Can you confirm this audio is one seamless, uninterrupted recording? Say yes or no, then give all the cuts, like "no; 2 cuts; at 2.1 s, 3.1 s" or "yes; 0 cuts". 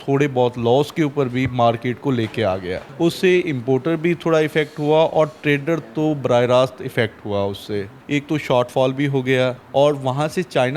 no; 3 cuts; at 2.8 s, 7.9 s, 9.6 s